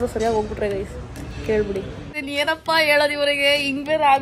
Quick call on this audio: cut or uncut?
cut